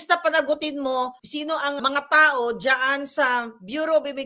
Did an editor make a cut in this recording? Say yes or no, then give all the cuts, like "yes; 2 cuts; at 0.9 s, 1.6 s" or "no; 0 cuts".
yes; 1 cut; at 1.8 s